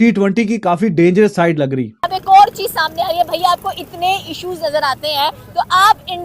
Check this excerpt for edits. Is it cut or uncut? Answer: cut